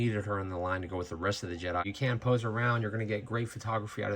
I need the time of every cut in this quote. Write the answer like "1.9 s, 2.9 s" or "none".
1.8 s

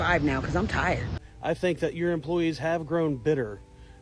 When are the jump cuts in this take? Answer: 1.1 s

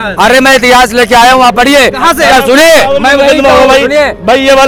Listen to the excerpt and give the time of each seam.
none

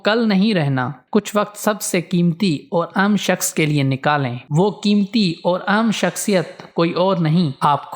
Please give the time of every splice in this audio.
1.0 s, 4.4 s

